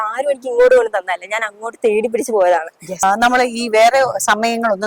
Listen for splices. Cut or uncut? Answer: cut